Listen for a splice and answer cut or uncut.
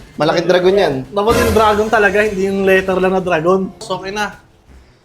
cut